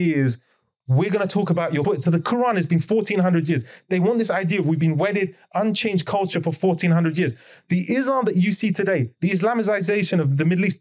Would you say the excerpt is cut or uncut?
cut